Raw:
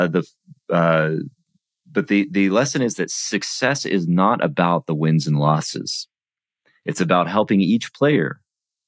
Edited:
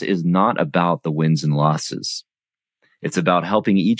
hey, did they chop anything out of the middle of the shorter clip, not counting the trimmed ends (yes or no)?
no